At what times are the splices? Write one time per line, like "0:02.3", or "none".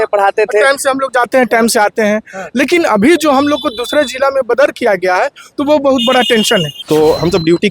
0:06.7